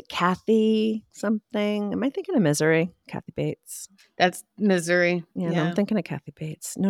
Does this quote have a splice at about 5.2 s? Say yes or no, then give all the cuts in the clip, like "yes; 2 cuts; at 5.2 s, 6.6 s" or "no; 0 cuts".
no; 0 cuts